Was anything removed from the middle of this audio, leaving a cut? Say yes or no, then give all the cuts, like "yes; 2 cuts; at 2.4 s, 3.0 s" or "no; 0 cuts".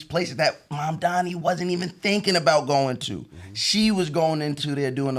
no; 0 cuts